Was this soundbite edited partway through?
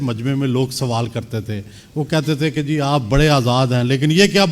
no; 0 cuts

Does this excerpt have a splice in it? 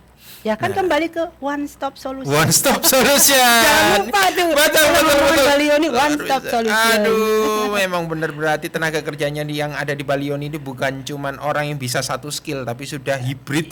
no; 0 cuts

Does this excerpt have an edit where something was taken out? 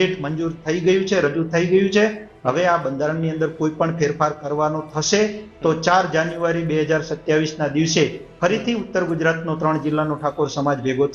no; 0 cuts

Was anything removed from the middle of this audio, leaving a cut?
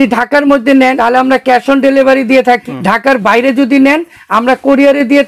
yes; 2 cuts; at 1.0 s, 2.6 s

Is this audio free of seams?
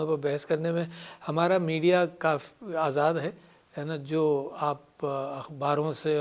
yes; 0 cuts

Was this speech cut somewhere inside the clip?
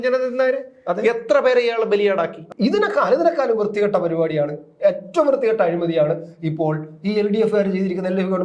yes; 1 cut; at 2.4 s

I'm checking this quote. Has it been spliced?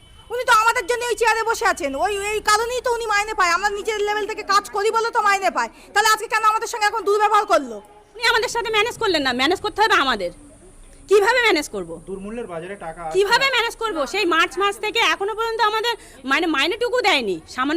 yes; 1 cut; at 8.2 s

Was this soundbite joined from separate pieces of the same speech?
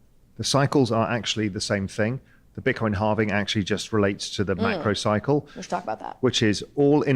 no; 0 cuts

